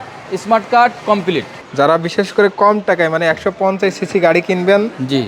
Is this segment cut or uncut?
cut